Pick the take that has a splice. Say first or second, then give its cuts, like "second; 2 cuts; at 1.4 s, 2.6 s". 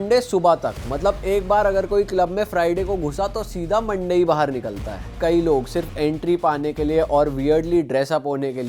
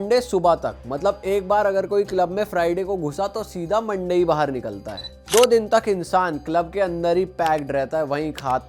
first; 1 cut; at 5.1 s